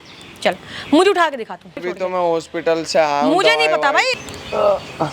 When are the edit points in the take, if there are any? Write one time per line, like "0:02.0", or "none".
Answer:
0:01.9
0:04.2